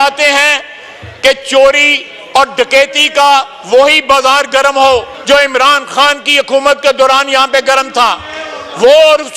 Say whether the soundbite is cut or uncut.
cut